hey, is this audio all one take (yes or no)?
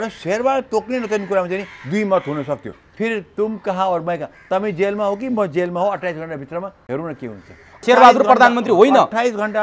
no